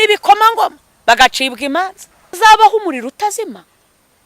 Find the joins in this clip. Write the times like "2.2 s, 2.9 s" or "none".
2.4 s